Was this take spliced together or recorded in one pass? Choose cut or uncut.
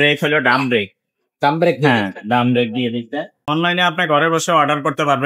cut